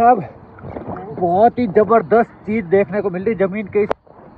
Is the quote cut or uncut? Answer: uncut